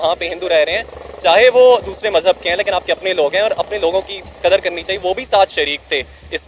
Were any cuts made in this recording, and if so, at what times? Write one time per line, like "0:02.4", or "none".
none